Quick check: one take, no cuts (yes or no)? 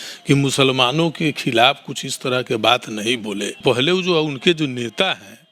no